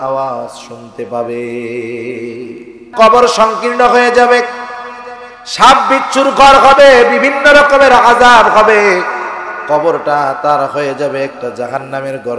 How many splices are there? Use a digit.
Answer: 1